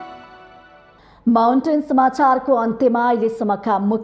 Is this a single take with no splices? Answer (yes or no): yes